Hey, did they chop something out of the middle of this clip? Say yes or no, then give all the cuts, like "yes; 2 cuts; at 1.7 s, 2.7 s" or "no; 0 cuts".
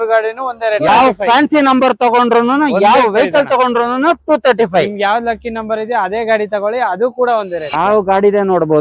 yes; 2 cuts; at 0.9 s, 7.6 s